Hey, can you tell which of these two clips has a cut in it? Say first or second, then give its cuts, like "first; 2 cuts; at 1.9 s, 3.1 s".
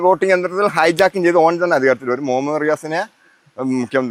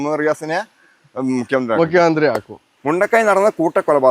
second; 1 cut; at 2.8 s